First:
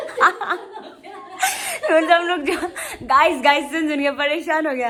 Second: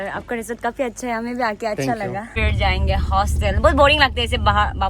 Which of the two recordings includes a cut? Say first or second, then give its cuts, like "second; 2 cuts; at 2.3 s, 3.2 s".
second; 1 cut; at 2.4 s